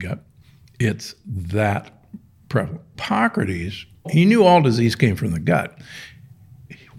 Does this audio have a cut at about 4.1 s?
yes; 2 cuts; at 2.9 s, 4.1 s

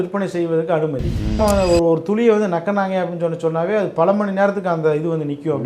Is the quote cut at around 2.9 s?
no; 1 cut; at 1.4 s

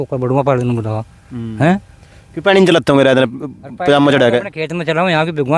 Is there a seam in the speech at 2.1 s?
no; 0 cuts

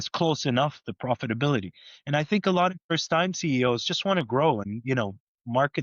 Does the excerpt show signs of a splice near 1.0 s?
no; 2 cuts; at 2.9 s, 4.6 s

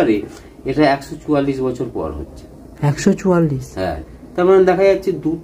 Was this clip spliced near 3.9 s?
no; 0 cuts

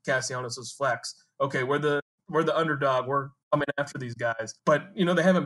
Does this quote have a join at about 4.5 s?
yes; 1 cut; at 4.5 s

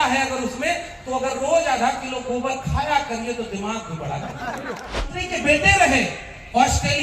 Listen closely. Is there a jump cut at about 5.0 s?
yes; 1 cut; at 5.0 s

